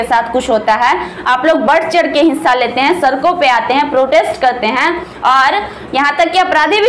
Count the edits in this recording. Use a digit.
0